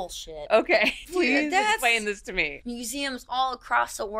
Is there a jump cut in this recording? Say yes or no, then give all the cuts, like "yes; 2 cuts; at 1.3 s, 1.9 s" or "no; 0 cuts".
yes; 2 cuts; at 1.0 s, 2.6 s